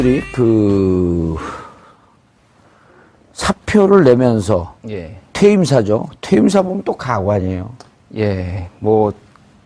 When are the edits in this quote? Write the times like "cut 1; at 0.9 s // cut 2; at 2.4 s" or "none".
none

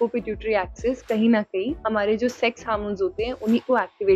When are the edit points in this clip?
cut 1; at 1.8 s

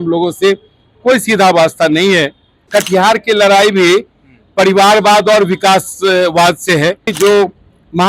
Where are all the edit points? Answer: cut 1; at 2.7 s // cut 2; at 7.1 s

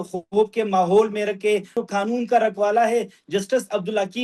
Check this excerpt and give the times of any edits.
cut 1; at 1.7 s

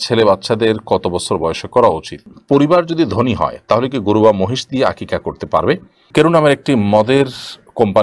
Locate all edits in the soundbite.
cut 1; at 2.3 s // cut 2; at 6.0 s

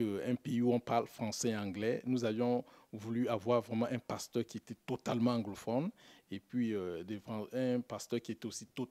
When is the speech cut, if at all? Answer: none

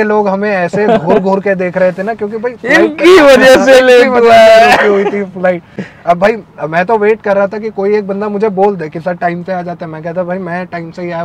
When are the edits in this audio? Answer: none

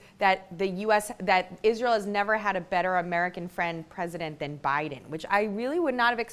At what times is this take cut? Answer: none

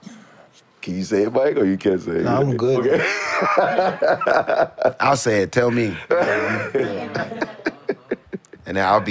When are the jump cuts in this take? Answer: cut 1; at 2.8 s

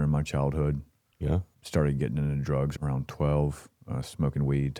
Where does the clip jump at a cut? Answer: cut 1; at 1.5 s // cut 2; at 2.7 s

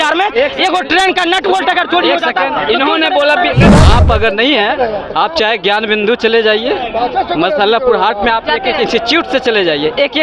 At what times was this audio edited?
cut 1; at 3.7 s

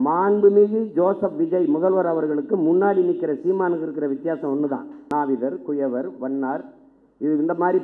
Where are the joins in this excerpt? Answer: cut 1; at 5.0 s

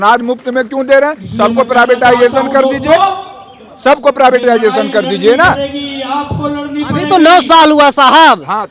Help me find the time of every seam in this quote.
none

